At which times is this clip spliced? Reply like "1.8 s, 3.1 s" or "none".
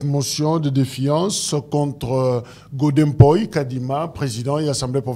none